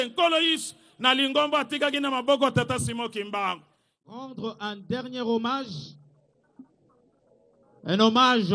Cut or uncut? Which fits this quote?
cut